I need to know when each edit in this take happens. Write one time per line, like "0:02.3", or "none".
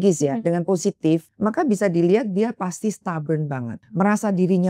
0:01.3
0:03.8